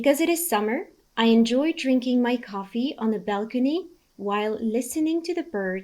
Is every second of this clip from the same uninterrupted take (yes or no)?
no